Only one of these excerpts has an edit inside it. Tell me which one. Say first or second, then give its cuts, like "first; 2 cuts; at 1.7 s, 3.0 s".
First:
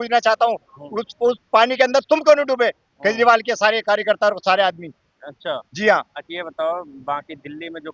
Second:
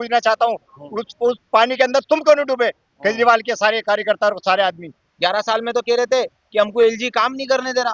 second; 1 cut; at 5.0 s